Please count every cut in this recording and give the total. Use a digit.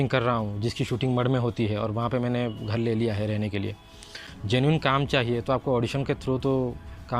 1